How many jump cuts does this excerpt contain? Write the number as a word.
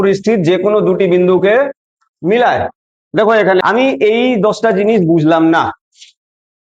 one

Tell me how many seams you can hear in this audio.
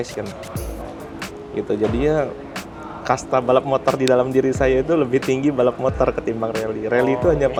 zero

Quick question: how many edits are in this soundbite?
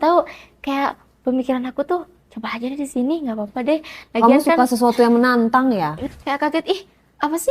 one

